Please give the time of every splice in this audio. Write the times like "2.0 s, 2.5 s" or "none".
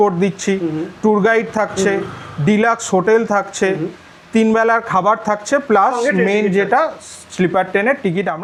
none